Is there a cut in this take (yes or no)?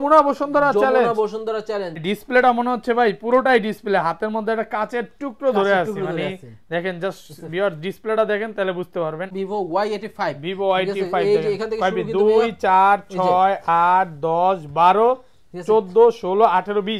yes